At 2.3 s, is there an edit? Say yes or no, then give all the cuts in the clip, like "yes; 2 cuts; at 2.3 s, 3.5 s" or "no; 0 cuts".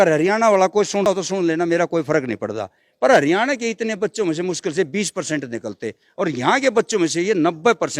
no; 1 cut; at 1.1 s